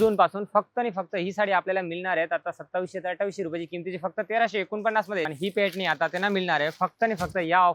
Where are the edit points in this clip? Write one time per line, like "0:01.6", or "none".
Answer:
0:05.3